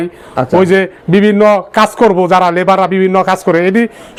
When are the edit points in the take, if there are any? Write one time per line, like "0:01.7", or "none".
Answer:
none